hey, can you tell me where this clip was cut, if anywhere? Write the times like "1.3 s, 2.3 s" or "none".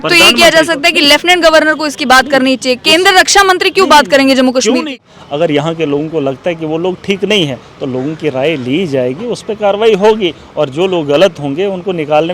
4.9 s